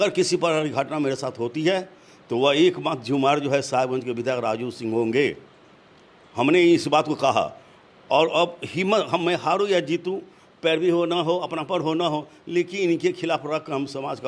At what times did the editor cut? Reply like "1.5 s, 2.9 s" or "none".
none